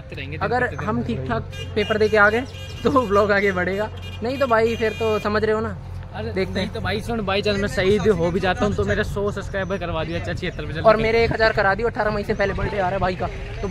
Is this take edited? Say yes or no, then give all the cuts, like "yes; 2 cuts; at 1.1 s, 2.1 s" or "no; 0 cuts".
no; 0 cuts